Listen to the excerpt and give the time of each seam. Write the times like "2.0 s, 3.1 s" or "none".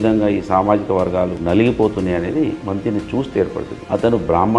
1.4 s, 3.8 s

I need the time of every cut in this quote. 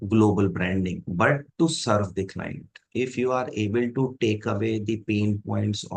2.8 s

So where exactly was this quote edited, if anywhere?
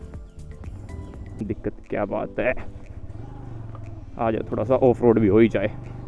1.3 s

